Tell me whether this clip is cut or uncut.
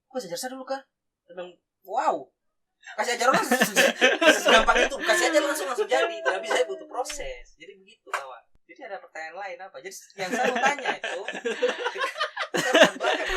uncut